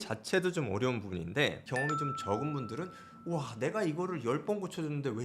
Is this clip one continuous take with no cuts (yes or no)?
no